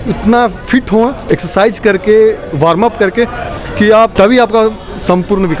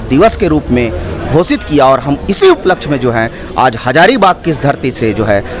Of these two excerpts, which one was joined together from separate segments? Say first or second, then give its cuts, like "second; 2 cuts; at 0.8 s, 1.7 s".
first; 2 cuts; at 1.2 s, 4.1 s